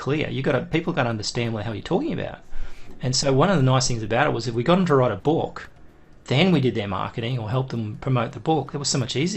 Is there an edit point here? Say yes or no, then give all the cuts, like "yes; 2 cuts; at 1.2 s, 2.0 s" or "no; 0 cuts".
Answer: no; 0 cuts